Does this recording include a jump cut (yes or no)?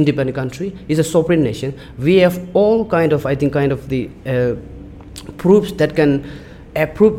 no